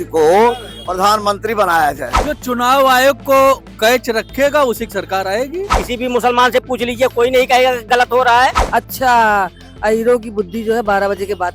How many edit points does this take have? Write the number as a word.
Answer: three